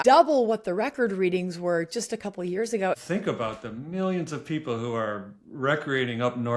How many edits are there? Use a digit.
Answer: 1